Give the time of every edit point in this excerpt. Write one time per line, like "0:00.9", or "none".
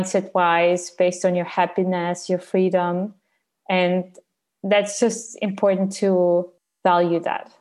0:06.6